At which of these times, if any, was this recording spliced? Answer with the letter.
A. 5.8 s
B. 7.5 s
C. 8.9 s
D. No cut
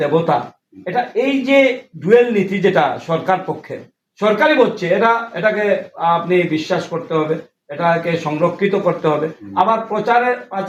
D